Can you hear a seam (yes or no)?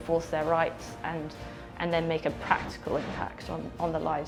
no